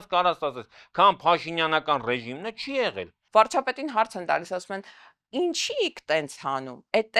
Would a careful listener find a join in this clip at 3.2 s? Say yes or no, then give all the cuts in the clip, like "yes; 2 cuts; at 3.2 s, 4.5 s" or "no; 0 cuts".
yes; 1 cut; at 3.2 s